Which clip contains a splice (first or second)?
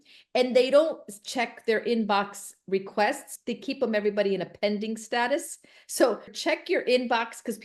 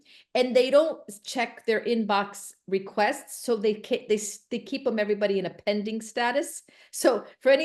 first